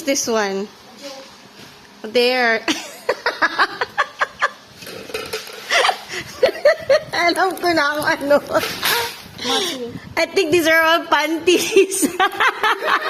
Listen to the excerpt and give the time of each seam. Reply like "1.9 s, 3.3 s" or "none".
none